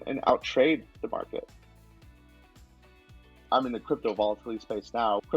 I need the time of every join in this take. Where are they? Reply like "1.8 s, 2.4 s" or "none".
none